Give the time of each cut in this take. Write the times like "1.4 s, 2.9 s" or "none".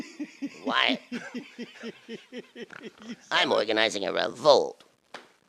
1.4 s